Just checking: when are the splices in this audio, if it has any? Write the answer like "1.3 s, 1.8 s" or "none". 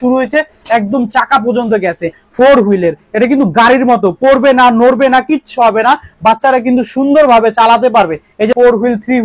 2.2 s, 8.5 s